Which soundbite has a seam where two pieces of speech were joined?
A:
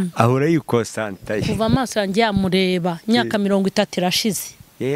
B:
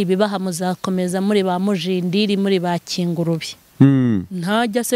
B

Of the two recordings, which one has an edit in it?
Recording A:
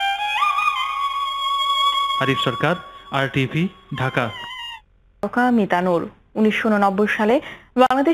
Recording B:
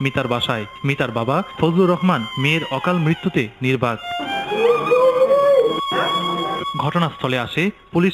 B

